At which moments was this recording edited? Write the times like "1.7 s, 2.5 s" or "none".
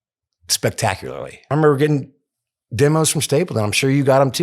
1.5 s